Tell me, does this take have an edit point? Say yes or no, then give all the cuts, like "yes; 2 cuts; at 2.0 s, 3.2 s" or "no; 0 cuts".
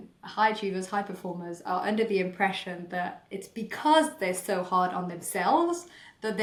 no; 0 cuts